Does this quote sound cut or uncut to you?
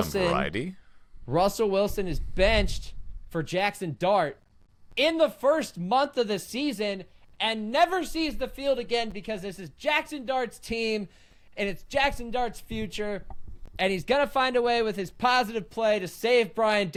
uncut